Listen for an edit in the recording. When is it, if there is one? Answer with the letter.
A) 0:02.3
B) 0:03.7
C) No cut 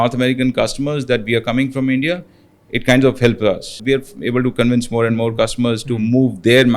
B